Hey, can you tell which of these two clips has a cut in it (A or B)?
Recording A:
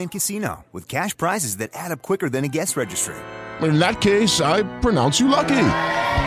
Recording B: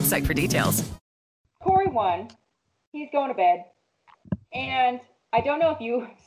B